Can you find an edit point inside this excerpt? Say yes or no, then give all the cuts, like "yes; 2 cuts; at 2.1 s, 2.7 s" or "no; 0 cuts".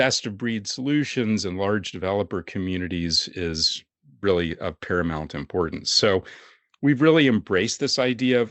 no; 0 cuts